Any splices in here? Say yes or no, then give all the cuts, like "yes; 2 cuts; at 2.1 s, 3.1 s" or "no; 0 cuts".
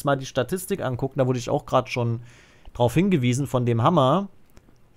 no; 0 cuts